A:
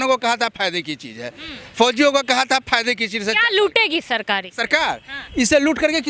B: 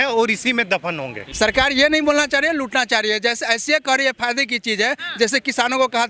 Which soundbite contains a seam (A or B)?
B